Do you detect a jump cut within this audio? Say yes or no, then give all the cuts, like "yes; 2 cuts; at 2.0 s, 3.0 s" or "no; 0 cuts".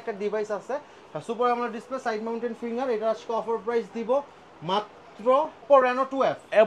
yes; 1 cut; at 5.6 s